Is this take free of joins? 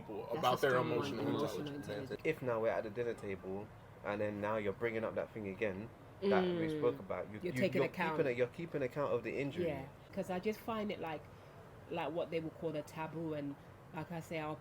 no; 2 cuts; at 2.1 s, 10.0 s

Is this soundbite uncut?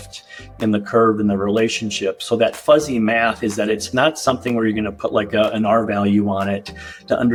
yes; 0 cuts

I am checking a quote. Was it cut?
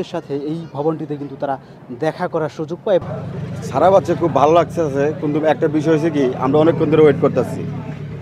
yes; 1 cut; at 3.1 s

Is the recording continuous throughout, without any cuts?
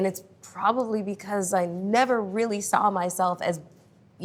yes; 0 cuts

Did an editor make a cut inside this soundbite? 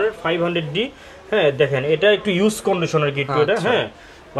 no; 0 cuts

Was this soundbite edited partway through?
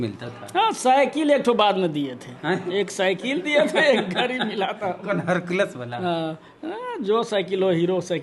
no; 0 cuts

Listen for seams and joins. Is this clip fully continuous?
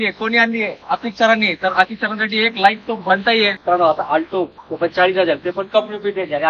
no; 1 cut; at 3.6 s

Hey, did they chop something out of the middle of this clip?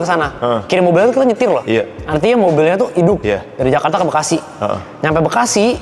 no; 0 cuts

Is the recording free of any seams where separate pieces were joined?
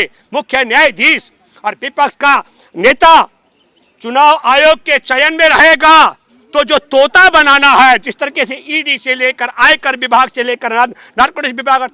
yes; 0 cuts

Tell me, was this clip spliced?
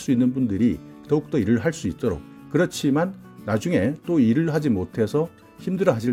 no; 0 cuts

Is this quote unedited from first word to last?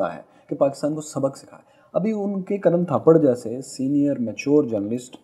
yes; 0 cuts

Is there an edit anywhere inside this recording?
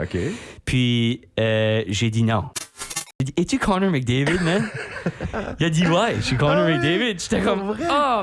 yes; 1 cut; at 3.1 s

